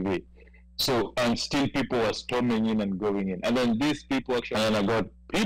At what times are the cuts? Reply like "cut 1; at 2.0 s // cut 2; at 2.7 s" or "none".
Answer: cut 1; at 4.5 s